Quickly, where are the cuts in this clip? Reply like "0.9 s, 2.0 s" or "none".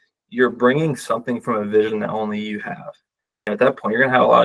3.3 s